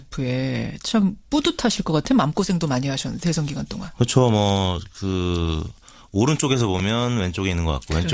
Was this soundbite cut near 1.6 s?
no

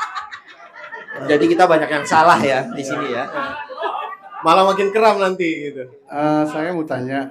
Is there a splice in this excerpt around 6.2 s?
yes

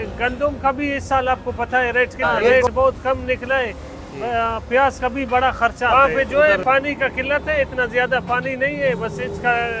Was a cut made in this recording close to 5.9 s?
yes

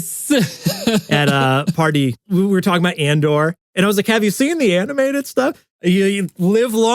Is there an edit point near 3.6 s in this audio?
yes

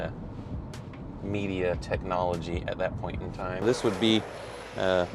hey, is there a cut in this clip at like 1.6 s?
no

